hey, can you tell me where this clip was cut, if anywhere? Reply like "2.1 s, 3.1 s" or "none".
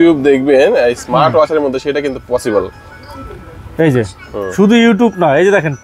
none